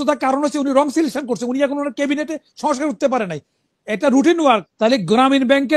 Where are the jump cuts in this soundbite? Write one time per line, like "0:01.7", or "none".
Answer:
0:04.7